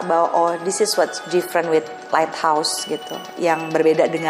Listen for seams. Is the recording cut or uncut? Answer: uncut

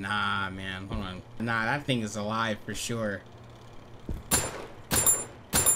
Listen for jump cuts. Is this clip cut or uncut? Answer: uncut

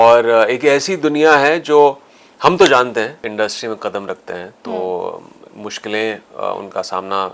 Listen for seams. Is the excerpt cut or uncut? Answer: cut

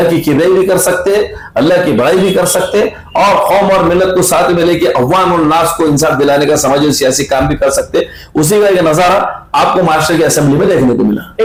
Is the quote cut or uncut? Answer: uncut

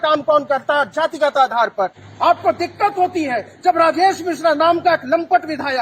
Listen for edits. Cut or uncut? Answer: cut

